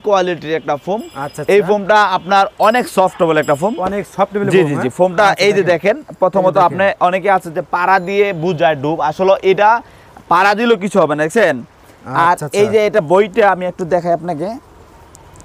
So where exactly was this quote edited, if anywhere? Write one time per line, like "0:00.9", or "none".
none